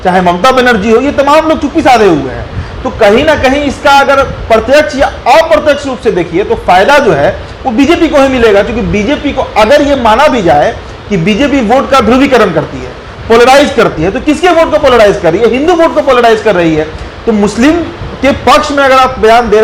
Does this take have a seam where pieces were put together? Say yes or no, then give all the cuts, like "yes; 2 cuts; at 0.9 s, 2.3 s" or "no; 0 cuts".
no; 0 cuts